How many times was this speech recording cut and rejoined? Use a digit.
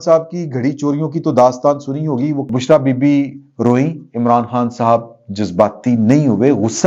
1